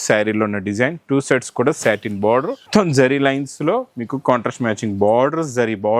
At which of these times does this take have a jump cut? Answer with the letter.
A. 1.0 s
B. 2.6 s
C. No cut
B